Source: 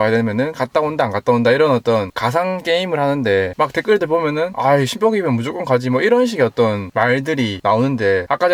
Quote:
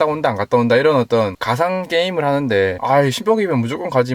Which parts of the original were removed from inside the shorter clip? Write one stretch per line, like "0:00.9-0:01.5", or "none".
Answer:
0:03.5-0:04.5